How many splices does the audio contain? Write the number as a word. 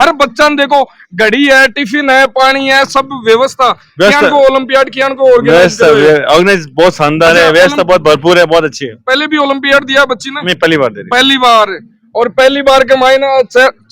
zero